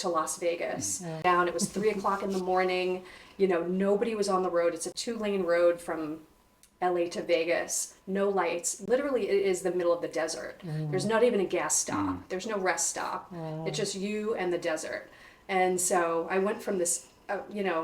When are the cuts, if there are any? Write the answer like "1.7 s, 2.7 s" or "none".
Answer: 1.2 s